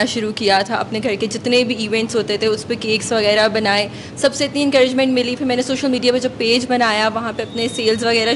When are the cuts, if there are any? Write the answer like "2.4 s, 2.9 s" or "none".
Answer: none